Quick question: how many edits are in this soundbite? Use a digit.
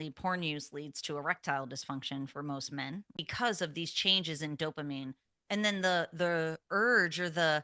1